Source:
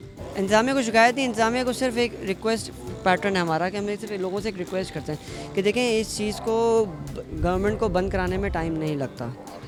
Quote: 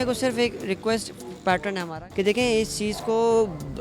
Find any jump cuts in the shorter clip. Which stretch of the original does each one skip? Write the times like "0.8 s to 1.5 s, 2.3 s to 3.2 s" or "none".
3.5 s to 5.3 s

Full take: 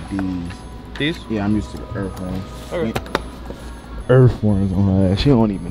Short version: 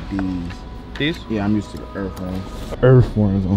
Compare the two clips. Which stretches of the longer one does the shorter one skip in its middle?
2.6 s to 3.8 s

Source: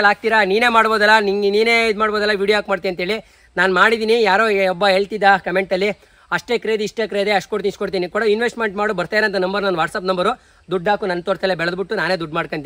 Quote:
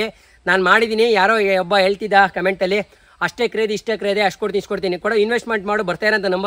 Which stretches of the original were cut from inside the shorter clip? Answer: none

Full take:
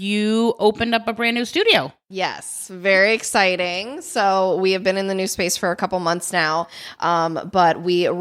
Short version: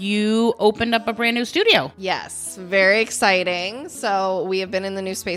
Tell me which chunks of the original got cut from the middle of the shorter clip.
1.9 s to 2.1 s

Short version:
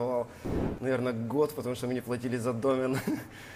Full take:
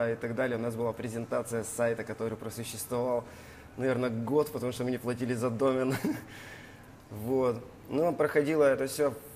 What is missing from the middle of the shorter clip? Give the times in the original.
none

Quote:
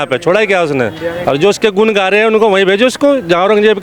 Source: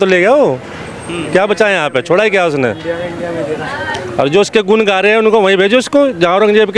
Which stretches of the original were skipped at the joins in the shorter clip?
3.0 s to 4.1 s

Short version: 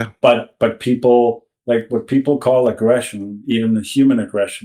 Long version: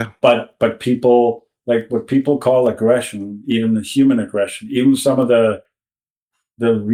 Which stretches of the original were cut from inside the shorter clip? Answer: none

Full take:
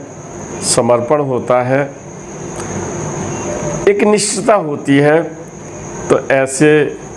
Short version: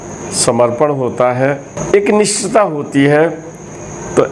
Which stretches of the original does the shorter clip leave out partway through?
2.0 s to 3.7 s

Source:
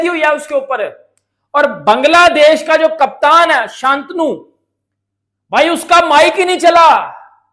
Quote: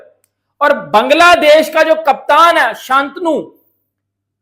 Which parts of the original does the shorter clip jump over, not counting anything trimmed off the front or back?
none

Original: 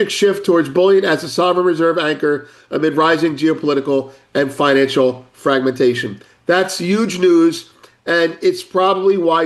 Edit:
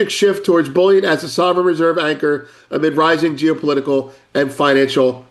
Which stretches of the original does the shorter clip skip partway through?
none

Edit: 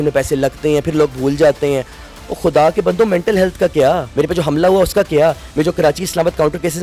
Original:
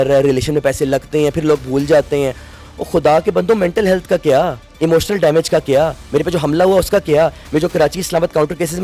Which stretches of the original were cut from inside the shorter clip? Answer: 4.6 s to 6.0 s

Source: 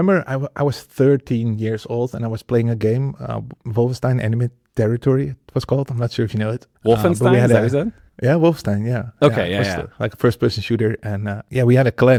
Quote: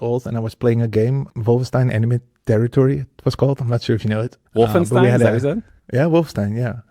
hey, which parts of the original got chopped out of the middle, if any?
3.2 s to 3.6 s

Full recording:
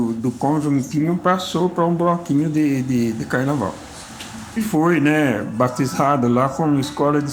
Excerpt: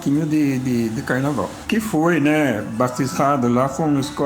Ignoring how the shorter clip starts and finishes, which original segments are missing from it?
3.8 s to 4.4 s

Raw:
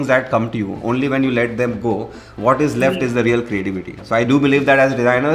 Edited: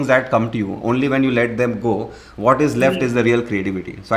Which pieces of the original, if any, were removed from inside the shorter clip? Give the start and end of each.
none

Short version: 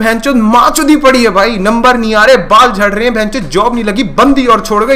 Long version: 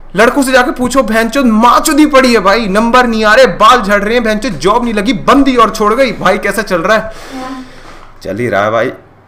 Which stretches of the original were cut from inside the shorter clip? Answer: none

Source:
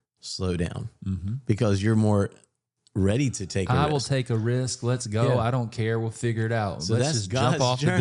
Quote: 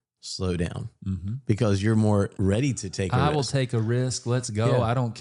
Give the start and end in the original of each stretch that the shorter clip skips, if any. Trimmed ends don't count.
2.3 s to 2.9 s

